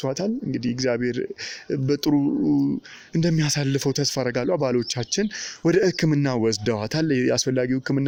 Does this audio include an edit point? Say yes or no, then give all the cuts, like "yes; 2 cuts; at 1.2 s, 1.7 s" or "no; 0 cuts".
no; 0 cuts